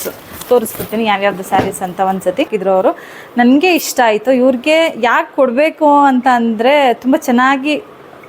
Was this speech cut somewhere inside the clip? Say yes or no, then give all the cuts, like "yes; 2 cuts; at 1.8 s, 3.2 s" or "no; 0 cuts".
yes; 1 cut; at 2.5 s